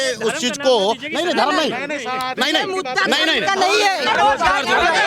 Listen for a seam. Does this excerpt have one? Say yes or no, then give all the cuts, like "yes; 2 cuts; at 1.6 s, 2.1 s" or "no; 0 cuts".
yes; 1 cut; at 4.1 s